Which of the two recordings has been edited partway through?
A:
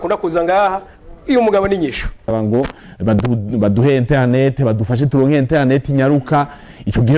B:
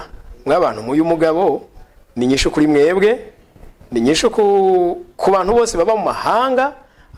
A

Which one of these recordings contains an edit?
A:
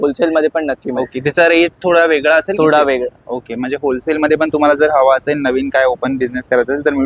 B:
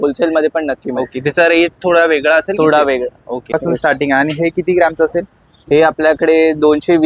B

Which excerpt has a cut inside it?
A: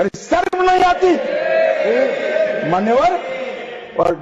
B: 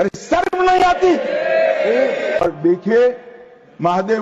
B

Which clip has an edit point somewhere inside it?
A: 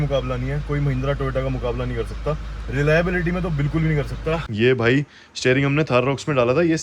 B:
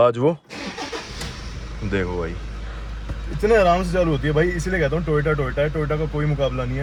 A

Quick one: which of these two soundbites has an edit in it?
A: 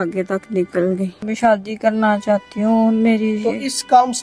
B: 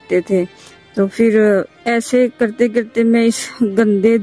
A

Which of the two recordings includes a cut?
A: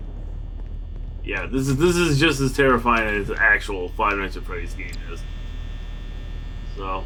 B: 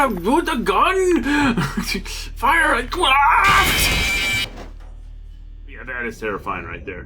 B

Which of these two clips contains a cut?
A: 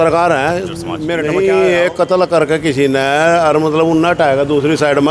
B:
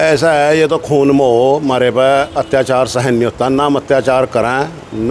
A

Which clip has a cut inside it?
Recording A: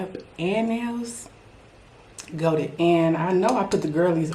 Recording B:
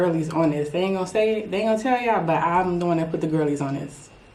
A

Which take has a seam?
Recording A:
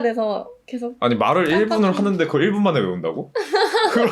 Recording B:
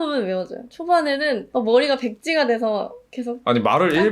B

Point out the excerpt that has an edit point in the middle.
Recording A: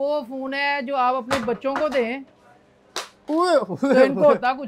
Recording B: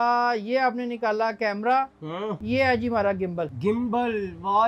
B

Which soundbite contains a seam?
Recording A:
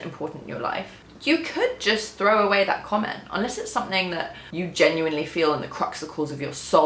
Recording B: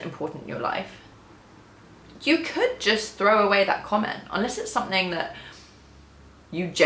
A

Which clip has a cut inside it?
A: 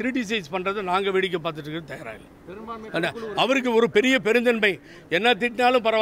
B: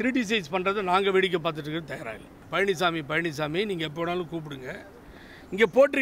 B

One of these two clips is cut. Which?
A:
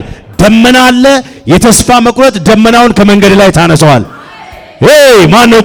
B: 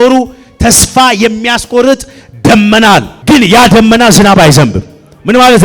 B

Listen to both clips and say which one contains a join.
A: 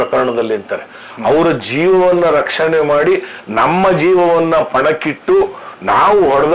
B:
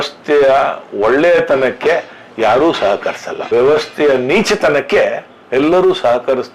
B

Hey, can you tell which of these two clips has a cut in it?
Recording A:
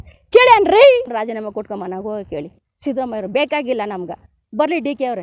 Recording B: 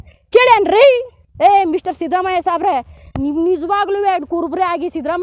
A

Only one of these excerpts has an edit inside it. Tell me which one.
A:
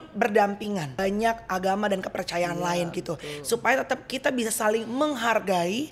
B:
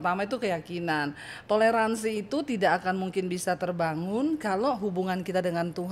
A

